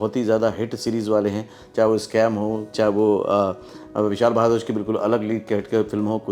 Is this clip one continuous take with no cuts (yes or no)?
yes